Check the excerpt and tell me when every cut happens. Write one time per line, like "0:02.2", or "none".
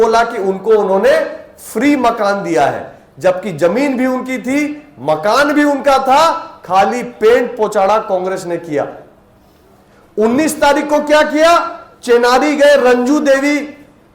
none